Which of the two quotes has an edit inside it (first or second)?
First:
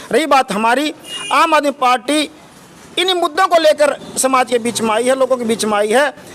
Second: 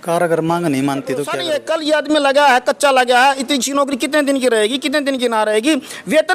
second